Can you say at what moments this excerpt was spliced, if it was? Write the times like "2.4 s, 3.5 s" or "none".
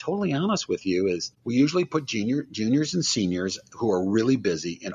1.3 s